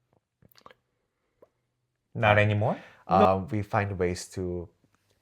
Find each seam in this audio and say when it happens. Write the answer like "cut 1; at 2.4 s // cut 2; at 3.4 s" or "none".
cut 1; at 2.9 s

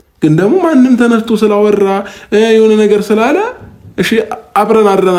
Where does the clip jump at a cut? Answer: none

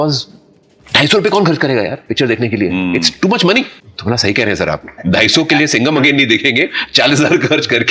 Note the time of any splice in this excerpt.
cut 1; at 3.7 s

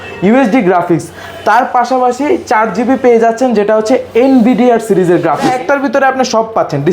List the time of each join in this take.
cut 1; at 5.5 s

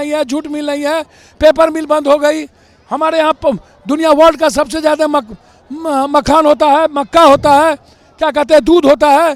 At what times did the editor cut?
none

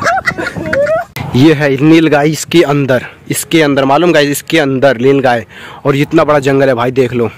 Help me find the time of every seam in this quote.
cut 1; at 1.2 s

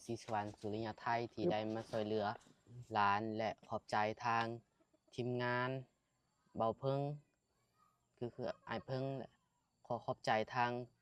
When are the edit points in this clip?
none

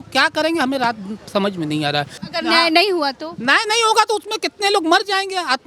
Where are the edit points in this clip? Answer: cut 1; at 2.2 s

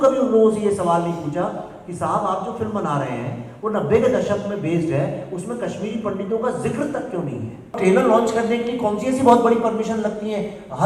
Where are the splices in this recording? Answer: cut 1; at 7.7 s

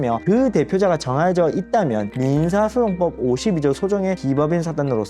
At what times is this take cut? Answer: none

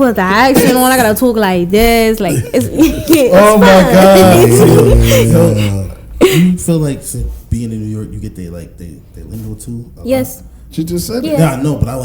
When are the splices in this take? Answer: none

